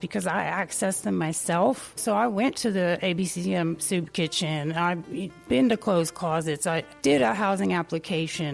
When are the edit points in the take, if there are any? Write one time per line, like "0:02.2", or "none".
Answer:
0:06.9